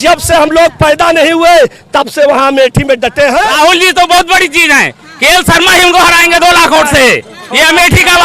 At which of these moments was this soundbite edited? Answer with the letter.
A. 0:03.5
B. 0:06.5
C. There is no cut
A